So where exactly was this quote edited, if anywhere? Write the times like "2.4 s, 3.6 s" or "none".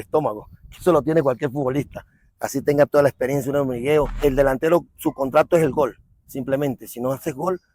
4.2 s